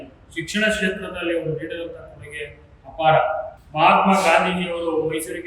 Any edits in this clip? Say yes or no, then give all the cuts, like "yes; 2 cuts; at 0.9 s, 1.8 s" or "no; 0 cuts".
yes; 1 cut; at 3.5 s